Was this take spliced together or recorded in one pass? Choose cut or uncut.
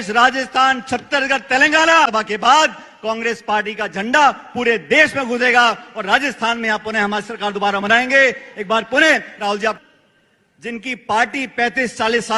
cut